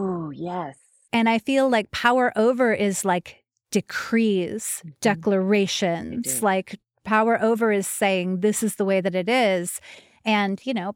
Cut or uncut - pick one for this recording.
cut